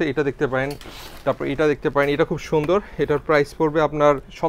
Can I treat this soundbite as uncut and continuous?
yes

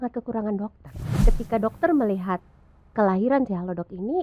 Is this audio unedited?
no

